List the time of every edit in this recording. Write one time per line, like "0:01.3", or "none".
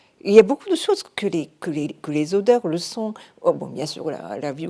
none